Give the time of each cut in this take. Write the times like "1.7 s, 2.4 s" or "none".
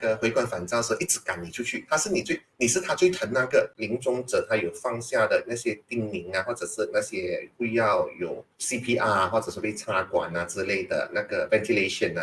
3.8 s, 7.5 s, 8.5 s